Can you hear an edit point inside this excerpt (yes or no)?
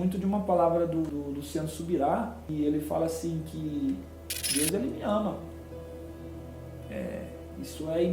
yes